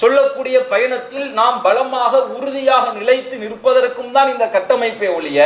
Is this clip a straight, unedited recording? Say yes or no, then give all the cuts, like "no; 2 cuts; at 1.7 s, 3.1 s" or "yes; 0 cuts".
yes; 0 cuts